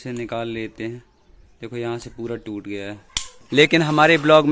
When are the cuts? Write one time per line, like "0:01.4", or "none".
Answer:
0:03.4